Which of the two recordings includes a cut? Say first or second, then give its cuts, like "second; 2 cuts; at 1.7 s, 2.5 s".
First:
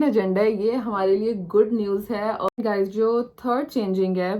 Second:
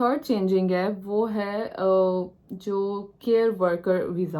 first; 1 cut; at 2.5 s